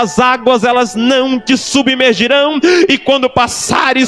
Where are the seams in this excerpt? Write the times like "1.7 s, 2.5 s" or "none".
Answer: none